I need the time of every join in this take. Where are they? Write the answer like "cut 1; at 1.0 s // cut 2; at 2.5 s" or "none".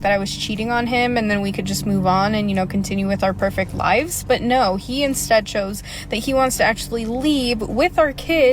cut 1; at 2.5 s